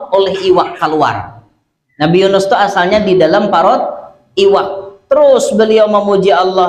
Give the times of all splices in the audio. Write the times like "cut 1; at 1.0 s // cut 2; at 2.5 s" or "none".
none